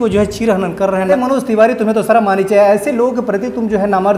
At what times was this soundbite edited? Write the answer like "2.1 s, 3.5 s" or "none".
1.1 s